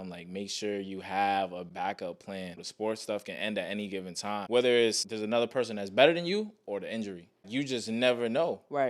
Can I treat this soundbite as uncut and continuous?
no; 5 cuts; at 1.7 s, 2.6 s, 4.3 s, 5.1 s, 7.4 s

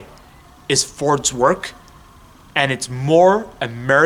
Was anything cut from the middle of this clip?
no; 0 cuts

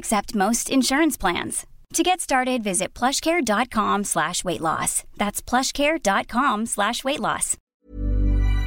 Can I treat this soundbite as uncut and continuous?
no; 1 cut; at 7.7 s

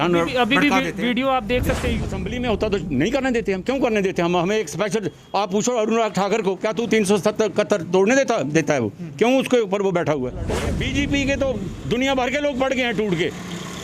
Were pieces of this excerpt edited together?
yes; 2 cuts; at 2.2 s, 10.5 s

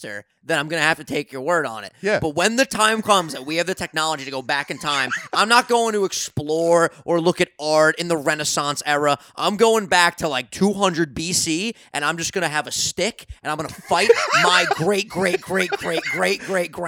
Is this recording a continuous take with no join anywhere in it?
yes; 0 cuts

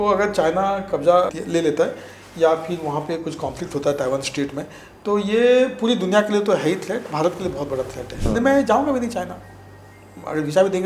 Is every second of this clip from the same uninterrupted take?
no; 2 cuts; at 1.4 s, 8.2 s

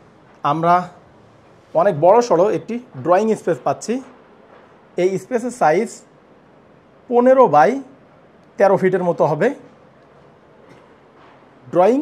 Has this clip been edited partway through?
no; 0 cuts

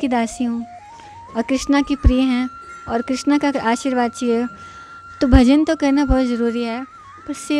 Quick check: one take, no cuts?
yes; 0 cuts

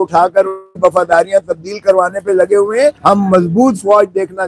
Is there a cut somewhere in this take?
yes; 1 cut; at 2.9 s

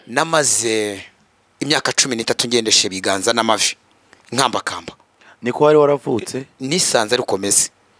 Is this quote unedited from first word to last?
yes; 0 cuts

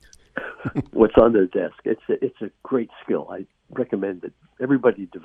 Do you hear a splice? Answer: no; 0 cuts

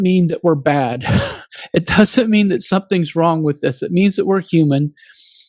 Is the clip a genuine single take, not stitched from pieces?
yes; 0 cuts

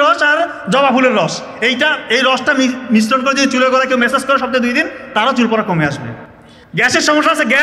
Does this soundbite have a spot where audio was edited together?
no; 0 cuts

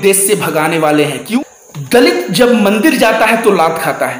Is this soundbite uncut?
no; 1 cut; at 1.3 s

